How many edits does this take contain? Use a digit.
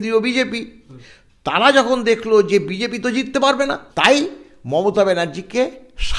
2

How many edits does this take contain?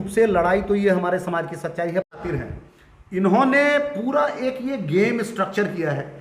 1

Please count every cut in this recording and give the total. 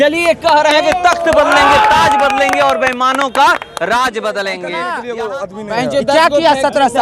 1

